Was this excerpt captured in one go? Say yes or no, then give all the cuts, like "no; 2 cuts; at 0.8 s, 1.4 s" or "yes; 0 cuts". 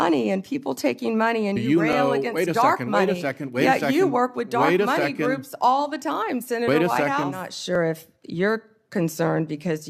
no; 1 cut; at 7.8 s